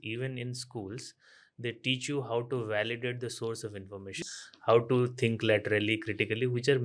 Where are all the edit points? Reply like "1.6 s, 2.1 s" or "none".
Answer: 4.2 s